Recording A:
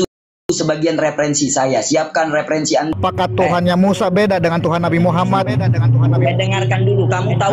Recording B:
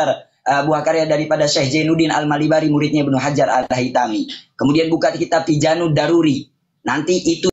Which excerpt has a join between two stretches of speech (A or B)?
A